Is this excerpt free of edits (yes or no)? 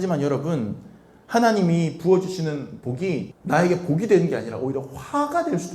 no